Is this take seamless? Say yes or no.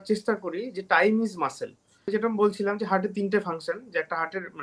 no